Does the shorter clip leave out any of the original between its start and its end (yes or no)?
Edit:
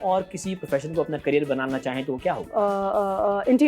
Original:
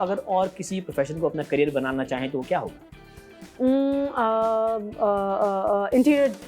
yes